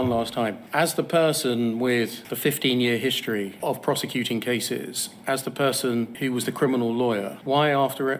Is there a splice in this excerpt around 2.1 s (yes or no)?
no